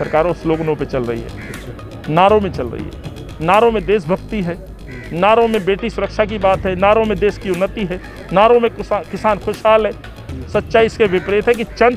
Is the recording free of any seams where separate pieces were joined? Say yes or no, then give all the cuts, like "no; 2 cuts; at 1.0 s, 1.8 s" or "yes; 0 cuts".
yes; 0 cuts